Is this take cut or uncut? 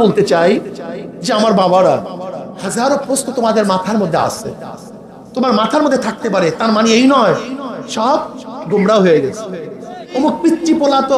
cut